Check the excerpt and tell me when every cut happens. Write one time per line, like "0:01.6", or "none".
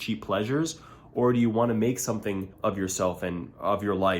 0:02.5